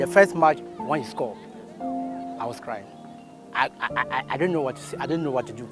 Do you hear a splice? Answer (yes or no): yes